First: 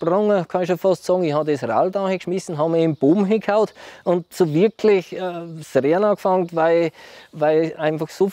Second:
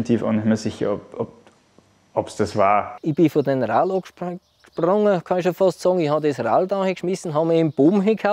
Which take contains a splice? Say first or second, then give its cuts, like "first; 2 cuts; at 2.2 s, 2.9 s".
second; 1 cut; at 2.9 s